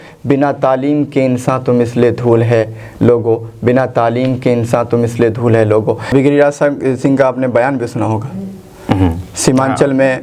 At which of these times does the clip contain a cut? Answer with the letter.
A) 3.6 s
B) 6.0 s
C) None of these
B